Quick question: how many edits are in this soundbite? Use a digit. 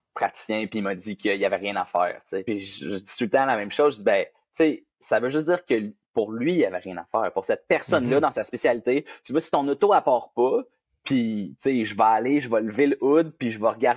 1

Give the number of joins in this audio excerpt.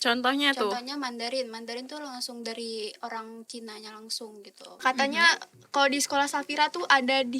1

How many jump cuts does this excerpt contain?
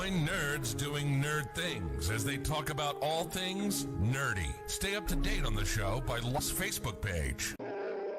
1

